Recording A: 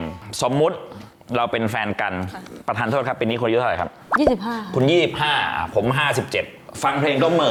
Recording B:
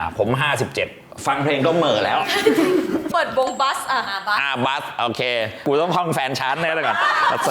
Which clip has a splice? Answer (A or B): B